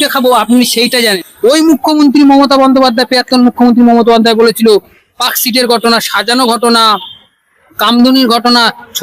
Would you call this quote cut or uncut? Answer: cut